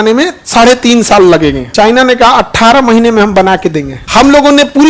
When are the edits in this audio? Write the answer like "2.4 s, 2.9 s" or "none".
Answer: 1.6 s, 4.0 s

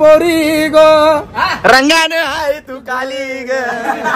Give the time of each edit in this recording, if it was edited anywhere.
none

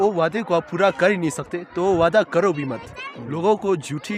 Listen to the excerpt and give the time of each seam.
none

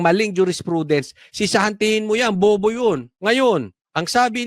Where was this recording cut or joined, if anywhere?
3.1 s

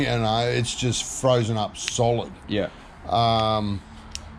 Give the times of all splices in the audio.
none

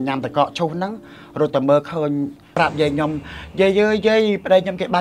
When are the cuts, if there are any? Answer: 2.5 s

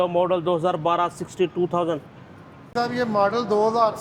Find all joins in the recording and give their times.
2.7 s

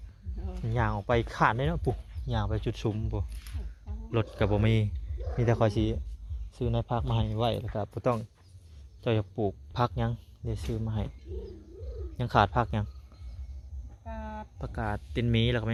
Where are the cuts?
none

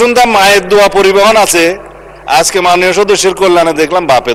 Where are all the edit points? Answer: none

